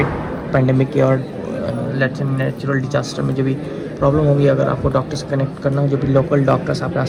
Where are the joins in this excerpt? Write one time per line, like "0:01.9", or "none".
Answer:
none